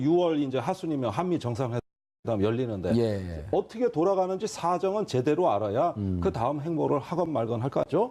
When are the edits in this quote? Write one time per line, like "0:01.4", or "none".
0:02.0